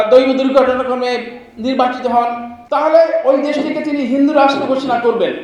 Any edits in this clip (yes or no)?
yes